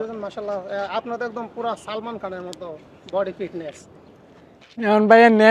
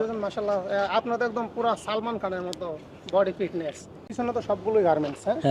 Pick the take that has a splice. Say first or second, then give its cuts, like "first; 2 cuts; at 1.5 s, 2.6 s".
second; 1 cut; at 4.0 s